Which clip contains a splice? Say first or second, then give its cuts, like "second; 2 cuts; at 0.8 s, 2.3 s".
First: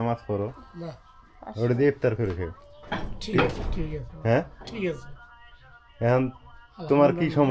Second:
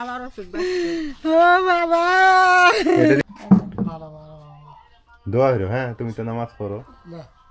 second; 1 cut; at 3.2 s